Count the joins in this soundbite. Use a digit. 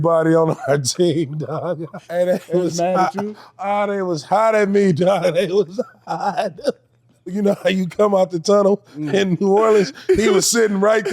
2